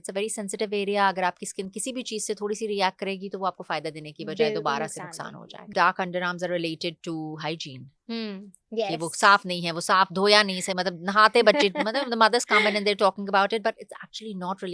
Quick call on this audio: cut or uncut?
cut